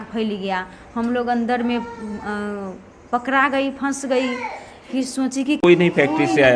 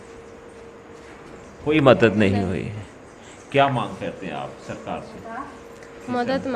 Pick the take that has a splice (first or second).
first